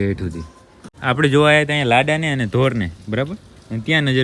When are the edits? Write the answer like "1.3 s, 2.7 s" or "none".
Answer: 0.9 s